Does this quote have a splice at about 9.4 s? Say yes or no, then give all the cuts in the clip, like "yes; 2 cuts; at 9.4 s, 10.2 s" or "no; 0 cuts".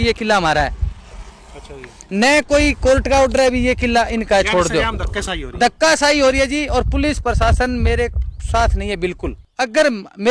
yes; 1 cut; at 9.4 s